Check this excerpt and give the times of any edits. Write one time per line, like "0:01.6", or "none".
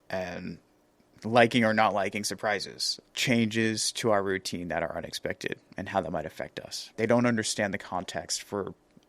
0:06.9